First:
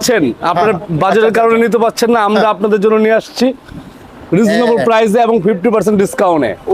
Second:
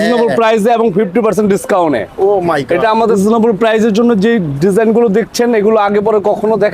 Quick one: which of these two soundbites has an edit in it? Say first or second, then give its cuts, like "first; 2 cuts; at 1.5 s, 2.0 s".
second; 1 cut; at 3.2 s